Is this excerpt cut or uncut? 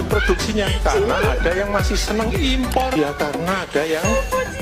cut